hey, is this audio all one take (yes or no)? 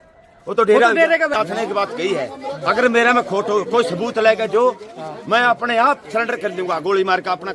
no